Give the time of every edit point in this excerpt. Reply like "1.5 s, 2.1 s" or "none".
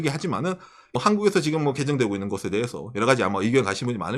0.9 s